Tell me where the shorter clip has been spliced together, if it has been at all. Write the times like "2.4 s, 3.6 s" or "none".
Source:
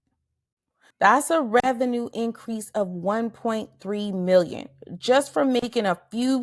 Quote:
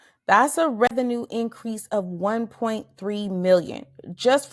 0.9 s